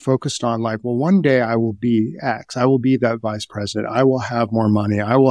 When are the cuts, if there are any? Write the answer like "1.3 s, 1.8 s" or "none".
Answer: none

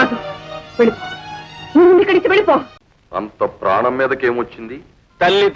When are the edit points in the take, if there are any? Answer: 2.7 s

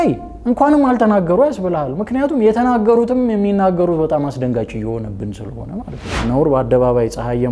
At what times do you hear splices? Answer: 6.1 s

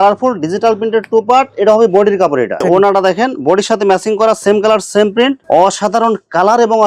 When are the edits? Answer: 2.6 s, 5.4 s

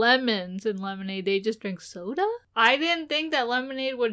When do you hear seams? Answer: 2.4 s

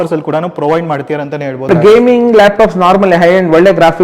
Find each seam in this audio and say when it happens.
1.7 s

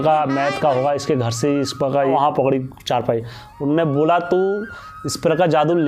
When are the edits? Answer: 2.1 s

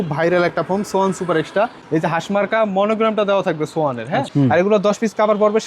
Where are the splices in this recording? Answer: 4.3 s

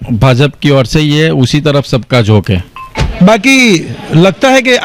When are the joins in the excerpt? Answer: 3.0 s

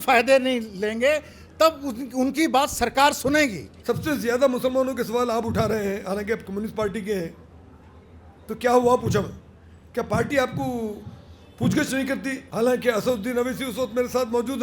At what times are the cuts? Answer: 3.7 s, 12.4 s

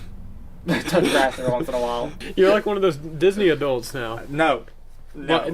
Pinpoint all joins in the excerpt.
2.1 s

